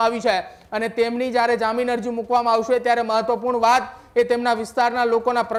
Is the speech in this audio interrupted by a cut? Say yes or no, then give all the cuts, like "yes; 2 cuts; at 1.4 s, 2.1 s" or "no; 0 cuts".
no; 0 cuts